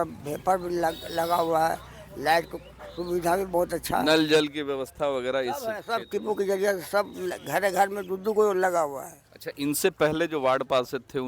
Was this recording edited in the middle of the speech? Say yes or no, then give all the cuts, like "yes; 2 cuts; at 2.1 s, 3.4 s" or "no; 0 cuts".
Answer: no; 0 cuts